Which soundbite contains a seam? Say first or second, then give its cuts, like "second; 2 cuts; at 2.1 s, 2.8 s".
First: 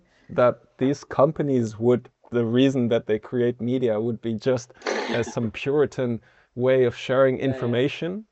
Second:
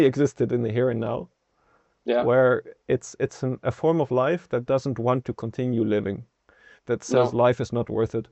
first; 1 cut; at 2.2 s